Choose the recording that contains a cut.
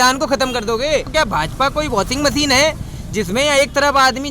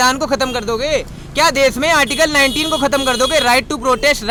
first; 1 cut; at 1.1 s

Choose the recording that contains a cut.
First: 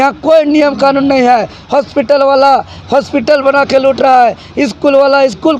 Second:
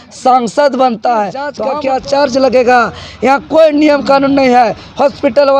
second; 1 cut; at 1.6 s

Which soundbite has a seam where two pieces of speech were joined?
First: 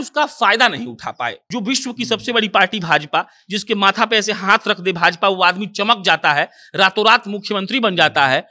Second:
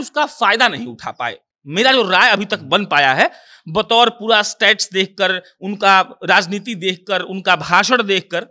first; 1 cut; at 1.4 s

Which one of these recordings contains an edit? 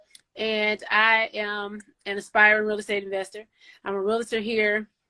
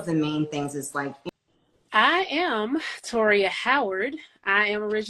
second; 1 cut; at 1.5 s

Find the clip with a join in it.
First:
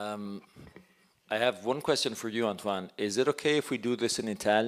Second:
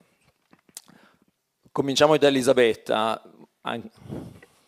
first; 1 cut; at 1.2 s

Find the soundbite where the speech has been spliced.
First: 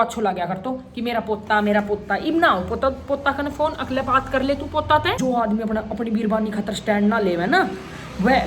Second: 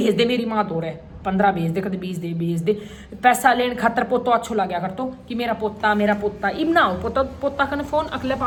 first; 1 cut; at 5.2 s

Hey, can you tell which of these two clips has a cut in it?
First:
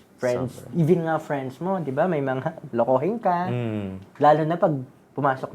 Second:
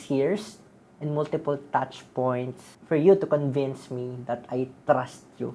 second; 1 cut; at 2.7 s

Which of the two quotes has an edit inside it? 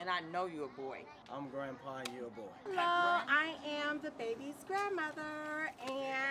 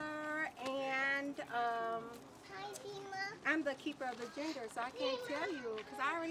first; 2 cuts; at 1.1 s, 2.6 s

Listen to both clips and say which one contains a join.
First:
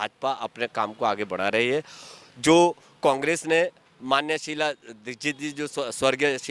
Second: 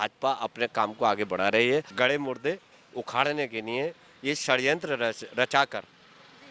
second; 1 cut; at 1.9 s

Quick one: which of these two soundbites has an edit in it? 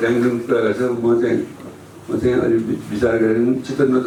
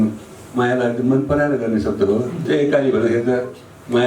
second; 1 cut; at 2.5 s

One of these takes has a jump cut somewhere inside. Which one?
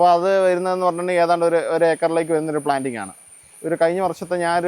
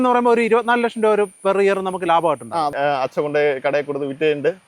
second; 1 cut; at 2.7 s

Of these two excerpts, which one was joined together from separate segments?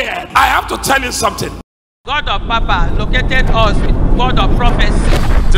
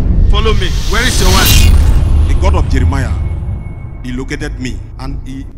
first; 1 cut; at 1.2 s

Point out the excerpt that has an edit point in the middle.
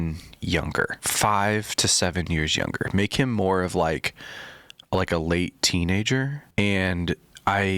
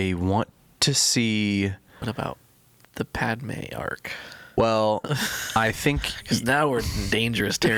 first; 2 cuts; at 1.0 s, 6.4 s

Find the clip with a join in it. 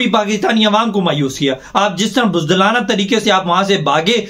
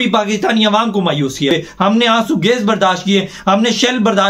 second; 1 cut; at 1.5 s

